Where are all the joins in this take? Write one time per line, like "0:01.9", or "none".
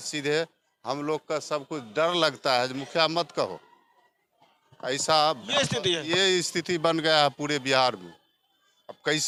none

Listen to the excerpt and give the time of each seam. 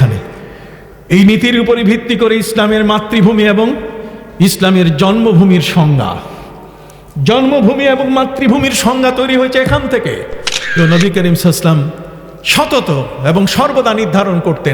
0:10.8

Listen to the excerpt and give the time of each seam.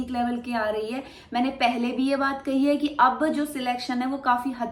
none

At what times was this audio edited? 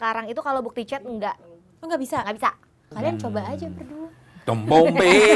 0:02.8

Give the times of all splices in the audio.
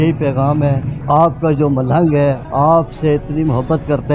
0:01.0
0:02.4

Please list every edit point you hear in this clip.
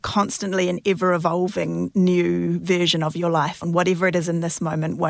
0:03.6

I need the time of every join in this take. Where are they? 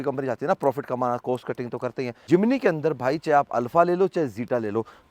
none

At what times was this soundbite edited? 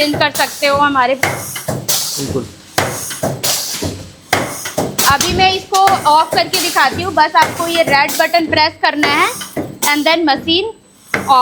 none

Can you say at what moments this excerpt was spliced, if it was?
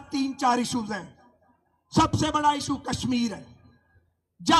none

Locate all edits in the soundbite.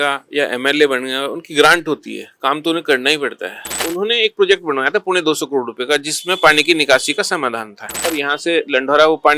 0:03.8
0:08.1

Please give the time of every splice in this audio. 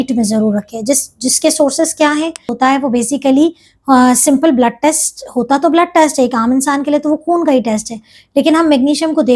0:02.5

